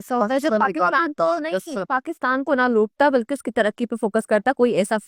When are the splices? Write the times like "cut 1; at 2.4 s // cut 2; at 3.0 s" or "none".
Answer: none